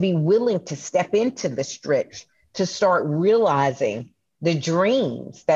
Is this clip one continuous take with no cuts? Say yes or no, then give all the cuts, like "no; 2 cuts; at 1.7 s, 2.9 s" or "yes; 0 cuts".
yes; 0 cuts